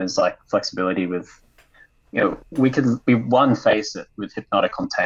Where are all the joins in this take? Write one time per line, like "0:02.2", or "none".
none